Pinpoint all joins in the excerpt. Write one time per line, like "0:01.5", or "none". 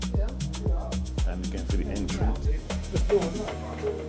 0:02.5